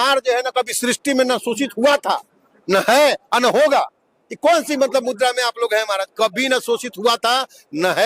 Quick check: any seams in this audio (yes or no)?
no